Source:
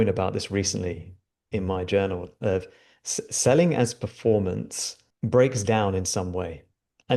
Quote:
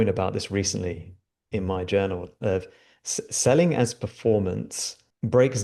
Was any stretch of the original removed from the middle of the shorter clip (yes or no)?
no